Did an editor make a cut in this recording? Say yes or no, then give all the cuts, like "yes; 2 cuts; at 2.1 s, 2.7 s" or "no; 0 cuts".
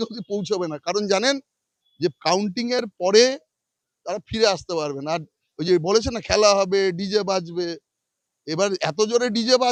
no; 0 cuts